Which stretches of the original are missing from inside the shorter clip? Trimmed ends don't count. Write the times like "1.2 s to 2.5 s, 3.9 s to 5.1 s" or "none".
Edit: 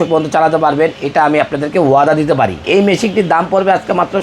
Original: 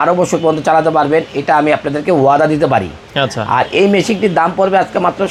3.0 s to 3.7 s

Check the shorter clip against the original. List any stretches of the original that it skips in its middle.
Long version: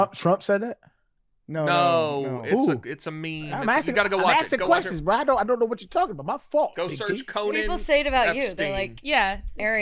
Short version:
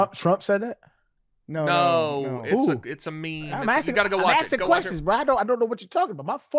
none

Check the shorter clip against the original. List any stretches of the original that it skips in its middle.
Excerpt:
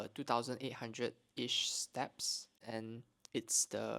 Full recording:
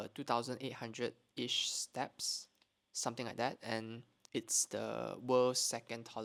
2.6 s to 3.6 s

